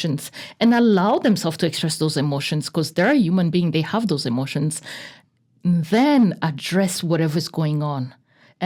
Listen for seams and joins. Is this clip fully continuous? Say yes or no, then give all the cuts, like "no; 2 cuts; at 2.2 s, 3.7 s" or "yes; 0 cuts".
yes; 0 cuts